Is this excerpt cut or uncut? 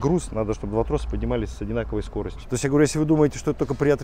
cut